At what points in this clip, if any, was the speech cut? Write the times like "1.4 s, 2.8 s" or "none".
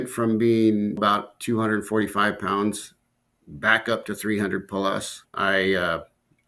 1.0 s, 5.2 s